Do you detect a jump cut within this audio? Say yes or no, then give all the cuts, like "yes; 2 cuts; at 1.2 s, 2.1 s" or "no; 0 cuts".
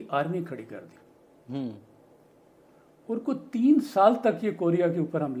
no; 0 cuts